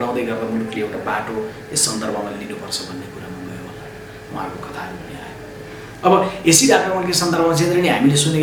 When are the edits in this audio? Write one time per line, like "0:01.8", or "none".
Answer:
none

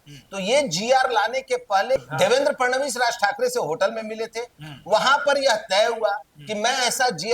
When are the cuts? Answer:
0:02.0

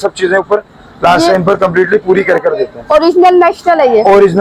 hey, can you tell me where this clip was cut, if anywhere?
none

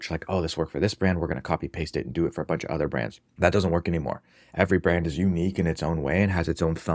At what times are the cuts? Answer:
0:03.2

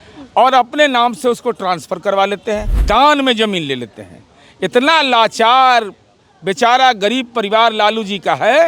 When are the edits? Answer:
0:02.7

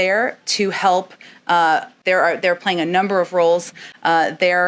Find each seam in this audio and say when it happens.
0:02.0

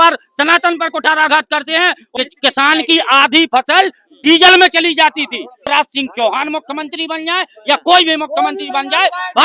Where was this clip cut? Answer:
0:02.0
0:05.7

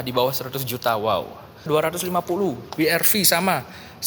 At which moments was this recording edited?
0:01.7

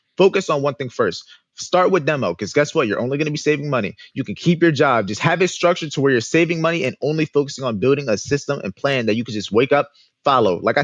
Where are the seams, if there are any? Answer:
none

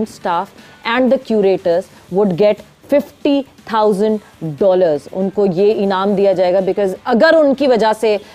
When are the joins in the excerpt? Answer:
none

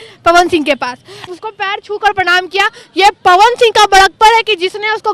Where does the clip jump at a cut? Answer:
0:01.3

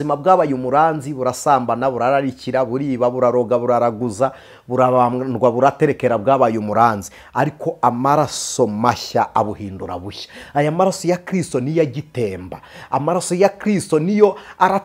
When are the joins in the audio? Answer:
none

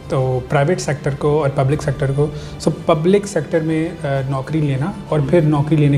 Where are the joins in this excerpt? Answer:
none

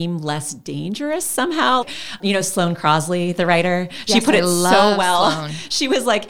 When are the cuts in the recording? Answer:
0:02.2

